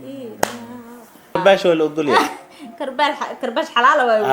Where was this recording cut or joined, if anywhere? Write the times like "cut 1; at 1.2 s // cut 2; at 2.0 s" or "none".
cut 1; at 1.4 s